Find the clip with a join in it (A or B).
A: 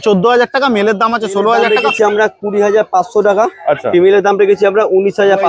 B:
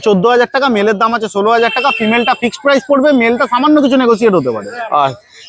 A